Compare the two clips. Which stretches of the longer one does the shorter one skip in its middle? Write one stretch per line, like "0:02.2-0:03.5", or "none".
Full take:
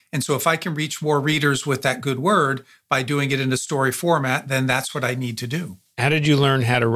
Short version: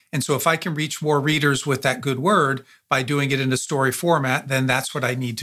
none